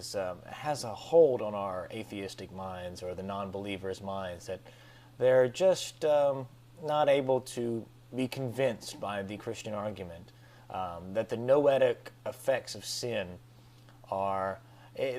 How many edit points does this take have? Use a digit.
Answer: 1